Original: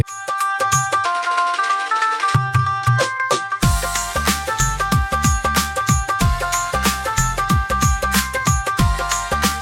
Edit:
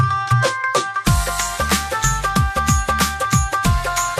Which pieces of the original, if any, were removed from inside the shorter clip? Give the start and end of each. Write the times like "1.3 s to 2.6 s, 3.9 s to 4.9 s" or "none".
none